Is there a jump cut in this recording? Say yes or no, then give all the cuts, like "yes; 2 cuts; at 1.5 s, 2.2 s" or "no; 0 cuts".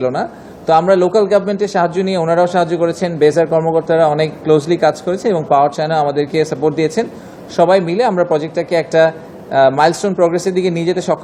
no; 0 cuts